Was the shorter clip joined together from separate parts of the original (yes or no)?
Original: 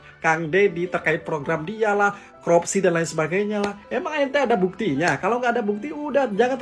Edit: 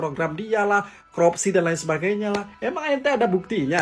no